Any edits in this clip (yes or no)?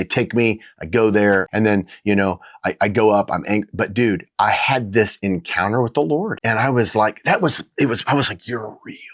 yes